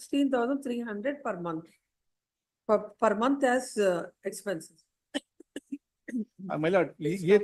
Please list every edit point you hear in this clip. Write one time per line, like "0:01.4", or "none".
none